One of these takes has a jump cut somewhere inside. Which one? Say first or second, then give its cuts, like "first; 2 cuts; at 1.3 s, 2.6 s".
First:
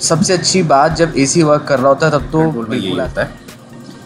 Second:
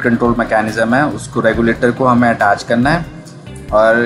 first; 1 cut; at 2.7 s